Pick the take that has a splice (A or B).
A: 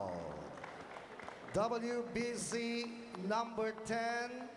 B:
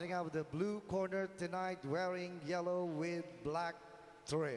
A